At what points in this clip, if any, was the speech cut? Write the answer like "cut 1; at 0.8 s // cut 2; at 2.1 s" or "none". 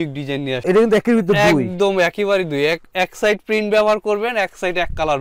none